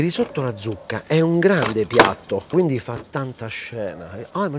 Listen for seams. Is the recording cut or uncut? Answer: cut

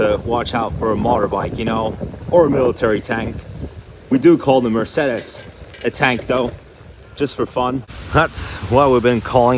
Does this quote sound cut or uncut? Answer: uncut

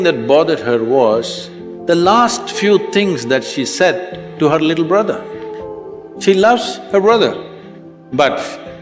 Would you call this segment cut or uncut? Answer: uncut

